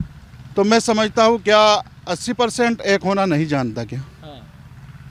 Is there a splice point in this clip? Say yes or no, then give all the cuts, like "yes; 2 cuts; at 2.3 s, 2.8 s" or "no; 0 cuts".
no; 0 cuts